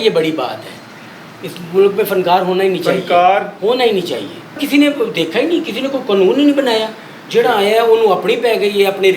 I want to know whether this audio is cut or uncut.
cut